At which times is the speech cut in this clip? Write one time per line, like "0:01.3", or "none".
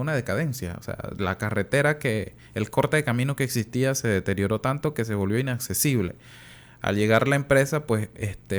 none

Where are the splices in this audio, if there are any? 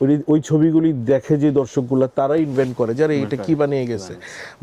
none

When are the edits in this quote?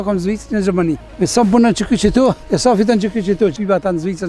0:01.1
0:02.4
0:03.5

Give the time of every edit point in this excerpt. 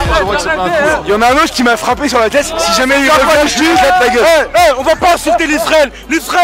0:01.0
0:04.5

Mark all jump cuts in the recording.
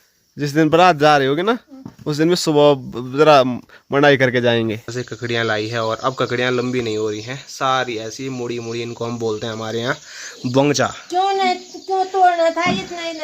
0:04.9

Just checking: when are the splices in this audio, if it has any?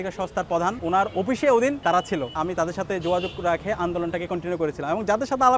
0:02.3

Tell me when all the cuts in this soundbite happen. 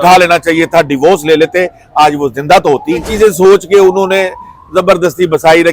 0:03.1

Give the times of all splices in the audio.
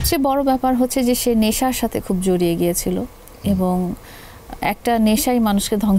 none

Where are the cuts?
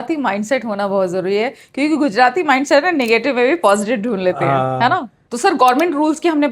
0:05.2

